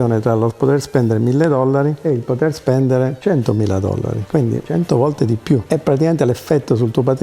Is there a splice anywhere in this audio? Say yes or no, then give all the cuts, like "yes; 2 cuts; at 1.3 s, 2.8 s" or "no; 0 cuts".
no; 0 cuts